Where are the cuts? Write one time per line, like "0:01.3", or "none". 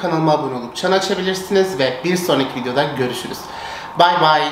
none